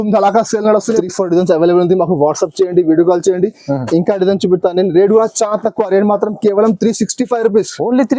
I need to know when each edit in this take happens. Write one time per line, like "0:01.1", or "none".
0:01.0